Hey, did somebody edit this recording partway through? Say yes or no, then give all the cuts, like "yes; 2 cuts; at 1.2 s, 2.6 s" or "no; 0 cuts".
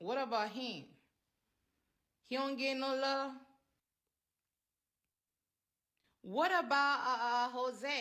no; 0 cuts